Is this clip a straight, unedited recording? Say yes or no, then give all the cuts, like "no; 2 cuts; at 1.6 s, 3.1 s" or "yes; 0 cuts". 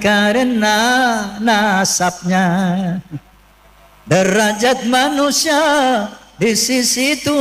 yes; 0 cuts